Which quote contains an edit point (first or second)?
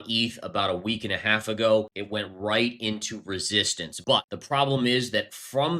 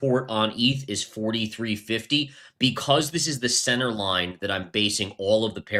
first